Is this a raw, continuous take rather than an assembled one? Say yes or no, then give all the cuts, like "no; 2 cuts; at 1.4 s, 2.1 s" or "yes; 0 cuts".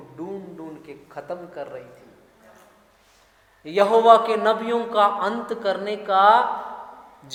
yes; 0 cuts